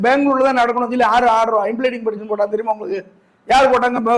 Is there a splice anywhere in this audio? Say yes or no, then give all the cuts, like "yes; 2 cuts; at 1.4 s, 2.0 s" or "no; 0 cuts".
no; 0 cuts